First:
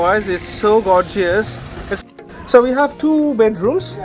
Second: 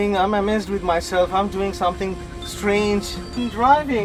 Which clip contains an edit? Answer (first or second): first